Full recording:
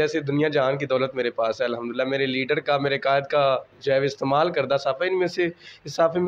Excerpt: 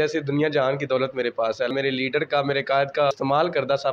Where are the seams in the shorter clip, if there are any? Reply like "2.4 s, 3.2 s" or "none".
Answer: 1.7 s, 3.1 s